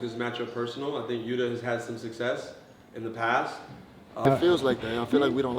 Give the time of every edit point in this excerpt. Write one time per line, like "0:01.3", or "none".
0:04.3